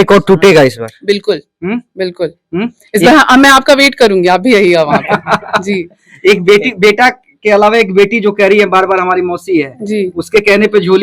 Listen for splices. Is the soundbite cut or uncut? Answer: uncut